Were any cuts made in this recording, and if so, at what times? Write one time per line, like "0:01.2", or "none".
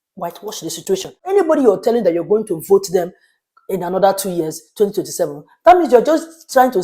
0:01.2